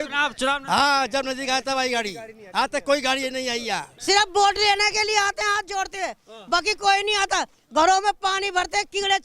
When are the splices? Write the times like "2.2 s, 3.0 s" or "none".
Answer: 3.9 s